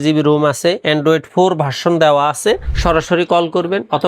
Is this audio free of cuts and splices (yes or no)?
no